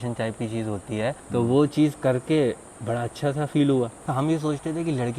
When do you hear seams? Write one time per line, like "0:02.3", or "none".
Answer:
0:01.2
0:04.0